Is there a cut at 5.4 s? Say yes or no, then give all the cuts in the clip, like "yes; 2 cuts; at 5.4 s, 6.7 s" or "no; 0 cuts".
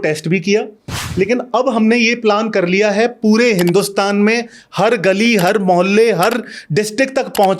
no; 1 cut; at 1.0 s